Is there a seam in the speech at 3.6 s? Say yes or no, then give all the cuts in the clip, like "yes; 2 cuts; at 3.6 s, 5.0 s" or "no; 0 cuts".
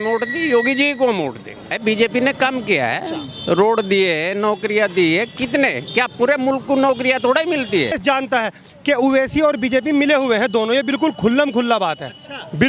no; 2 cuts; at 1.7 s, 8.0 s